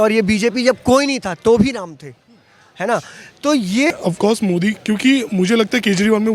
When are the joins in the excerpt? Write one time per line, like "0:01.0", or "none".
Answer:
0:03.9